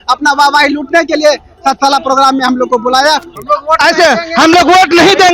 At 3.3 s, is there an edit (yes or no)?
yes